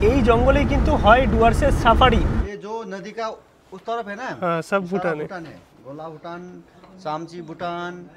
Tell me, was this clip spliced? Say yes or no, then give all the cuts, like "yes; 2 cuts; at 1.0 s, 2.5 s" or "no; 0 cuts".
yes; 1 cut; at 2.4 s